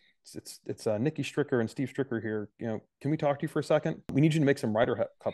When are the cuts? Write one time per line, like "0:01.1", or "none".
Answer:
0:04.1